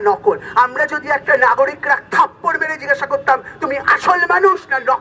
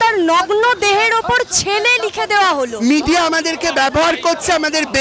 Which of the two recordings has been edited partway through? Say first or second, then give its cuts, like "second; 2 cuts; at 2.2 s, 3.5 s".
second; 1 cut; at 2.7 s